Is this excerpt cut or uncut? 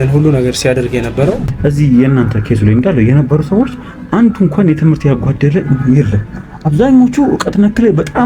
cut